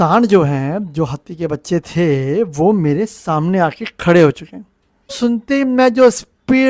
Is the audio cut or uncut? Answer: cut